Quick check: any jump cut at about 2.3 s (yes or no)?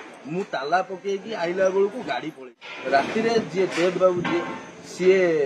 yes